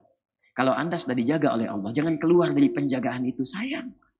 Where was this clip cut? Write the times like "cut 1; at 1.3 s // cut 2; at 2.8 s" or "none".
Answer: none